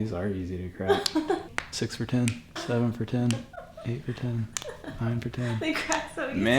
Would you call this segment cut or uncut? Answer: cut